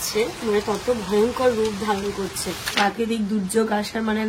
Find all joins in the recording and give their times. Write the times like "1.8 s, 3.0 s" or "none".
2.7 s